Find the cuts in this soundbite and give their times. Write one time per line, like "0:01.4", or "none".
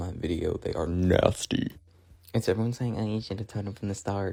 none